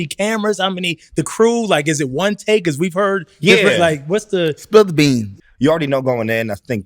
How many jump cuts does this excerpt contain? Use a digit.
1